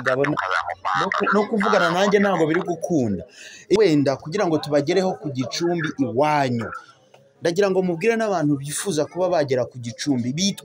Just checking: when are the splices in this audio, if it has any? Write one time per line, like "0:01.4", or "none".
0:03.8